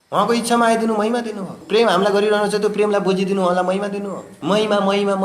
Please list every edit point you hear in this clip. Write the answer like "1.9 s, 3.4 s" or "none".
1.5 s, 4.3 s